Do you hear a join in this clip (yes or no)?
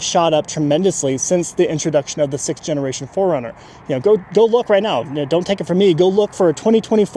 no